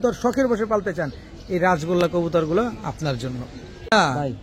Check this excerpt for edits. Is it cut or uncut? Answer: uncut